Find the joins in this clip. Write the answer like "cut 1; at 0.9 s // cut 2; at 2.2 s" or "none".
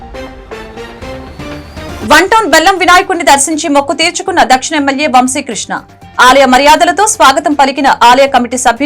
cut 1; at 1.2 s